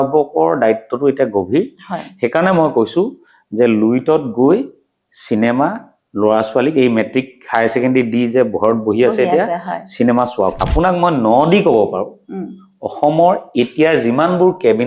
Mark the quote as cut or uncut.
cut